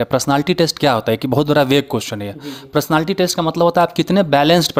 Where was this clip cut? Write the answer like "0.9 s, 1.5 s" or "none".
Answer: none